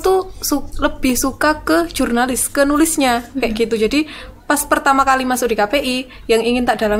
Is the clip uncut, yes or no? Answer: yes